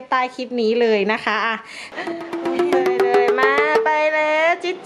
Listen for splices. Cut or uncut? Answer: cut